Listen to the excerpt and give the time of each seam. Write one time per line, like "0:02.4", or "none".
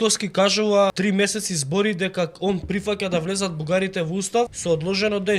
0:00.9
0:04.6